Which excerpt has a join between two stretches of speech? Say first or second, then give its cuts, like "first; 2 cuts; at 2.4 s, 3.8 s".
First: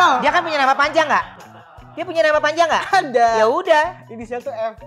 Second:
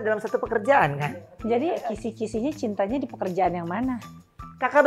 second; 1 cut; at 1.8 s